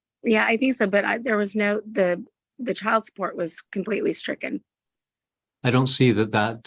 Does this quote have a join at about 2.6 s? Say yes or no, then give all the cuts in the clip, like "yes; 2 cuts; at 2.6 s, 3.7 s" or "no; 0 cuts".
no; 0 cuts